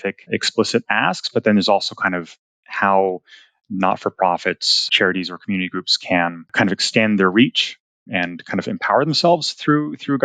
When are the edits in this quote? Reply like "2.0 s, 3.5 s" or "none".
4.9 s